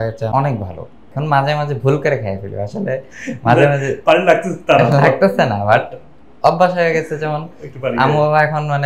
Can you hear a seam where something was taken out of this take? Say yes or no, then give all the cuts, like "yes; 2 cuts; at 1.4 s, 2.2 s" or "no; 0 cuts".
yes; 1 cut; at 1.0 s